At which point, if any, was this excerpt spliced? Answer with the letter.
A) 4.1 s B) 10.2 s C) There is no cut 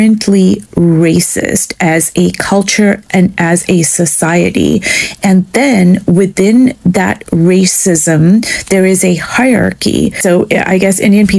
B